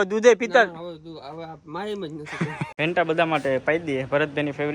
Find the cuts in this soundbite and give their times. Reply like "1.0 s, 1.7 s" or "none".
2.6 s